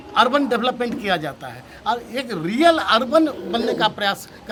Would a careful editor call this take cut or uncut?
uncut